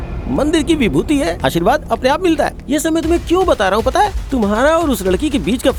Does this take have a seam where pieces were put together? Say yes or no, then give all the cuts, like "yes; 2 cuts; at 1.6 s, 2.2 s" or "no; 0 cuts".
no; 0 cuts